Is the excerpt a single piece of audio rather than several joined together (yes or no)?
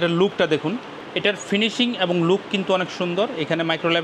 no